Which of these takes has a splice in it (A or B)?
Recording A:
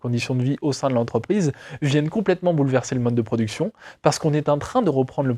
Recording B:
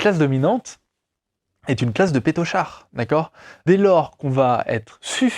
B